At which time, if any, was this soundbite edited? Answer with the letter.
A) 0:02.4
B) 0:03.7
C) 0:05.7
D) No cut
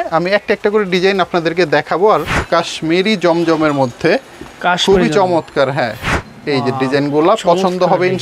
A